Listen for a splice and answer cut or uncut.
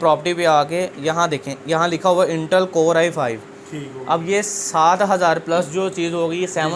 uncut